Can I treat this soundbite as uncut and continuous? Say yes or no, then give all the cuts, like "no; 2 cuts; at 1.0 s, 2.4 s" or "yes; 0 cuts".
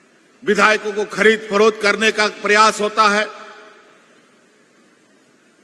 yes; 0 cuts